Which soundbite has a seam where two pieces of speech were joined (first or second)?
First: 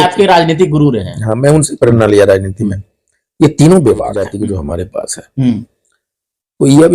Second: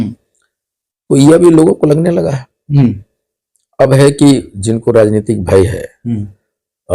first